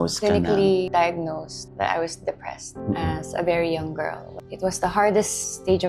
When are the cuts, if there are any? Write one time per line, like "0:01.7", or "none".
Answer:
0:02.7
0:04.4